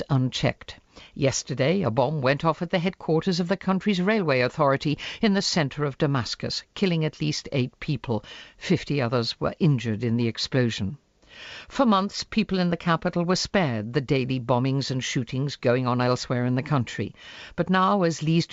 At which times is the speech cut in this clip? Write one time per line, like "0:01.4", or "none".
none